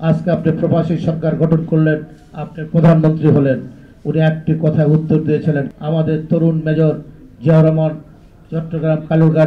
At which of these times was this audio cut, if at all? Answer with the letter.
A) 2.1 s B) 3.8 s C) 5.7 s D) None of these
C